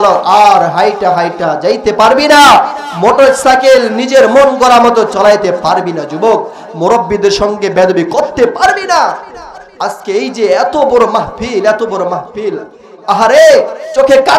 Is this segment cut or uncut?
uncut